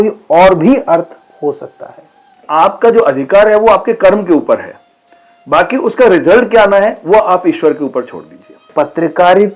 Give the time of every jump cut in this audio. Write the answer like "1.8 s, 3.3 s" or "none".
2.4 s, 8.7 s